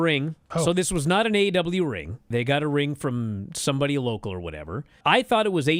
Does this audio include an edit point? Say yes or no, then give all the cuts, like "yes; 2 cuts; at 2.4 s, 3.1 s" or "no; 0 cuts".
no; 0 cuts